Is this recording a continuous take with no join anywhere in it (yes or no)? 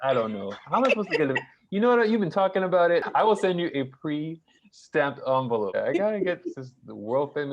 no